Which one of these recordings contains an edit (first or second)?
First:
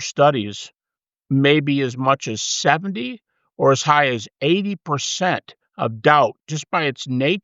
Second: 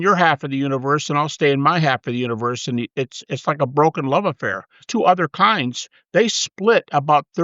second